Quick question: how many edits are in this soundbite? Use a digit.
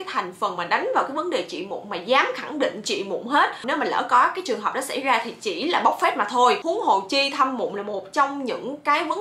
1